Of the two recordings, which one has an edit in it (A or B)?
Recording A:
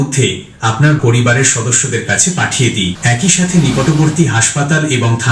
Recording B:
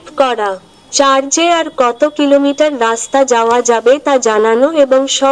A